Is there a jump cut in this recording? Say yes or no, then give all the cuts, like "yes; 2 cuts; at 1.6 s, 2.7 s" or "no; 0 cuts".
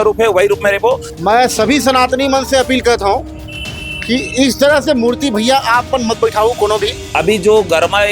yes; 2 cuts; at 1.1 s, 7.1 s